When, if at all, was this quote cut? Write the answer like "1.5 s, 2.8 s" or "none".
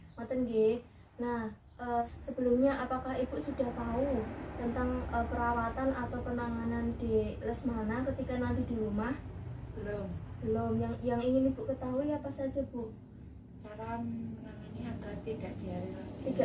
2.0 s